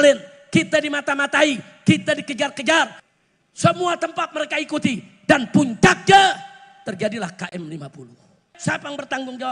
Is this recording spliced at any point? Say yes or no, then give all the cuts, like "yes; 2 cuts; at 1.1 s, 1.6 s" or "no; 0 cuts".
yes; 2 cuts; at 3.0 s, 8.5 s